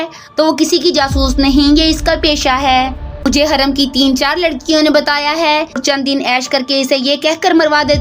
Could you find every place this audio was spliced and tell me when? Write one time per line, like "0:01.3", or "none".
0:03.2
0:05.8